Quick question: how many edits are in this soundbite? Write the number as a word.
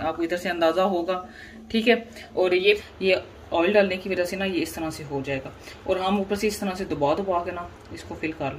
one